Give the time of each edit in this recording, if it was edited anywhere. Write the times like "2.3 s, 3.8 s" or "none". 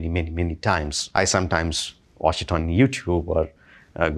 1.0 s